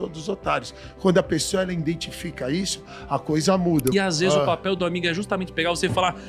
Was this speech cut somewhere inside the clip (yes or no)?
yes